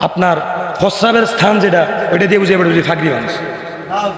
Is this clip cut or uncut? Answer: uncut